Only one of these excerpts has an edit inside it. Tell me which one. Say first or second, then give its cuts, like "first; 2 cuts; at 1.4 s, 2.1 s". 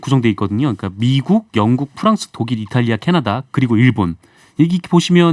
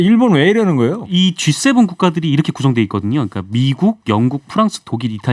second; 1 cut; at 1.0 s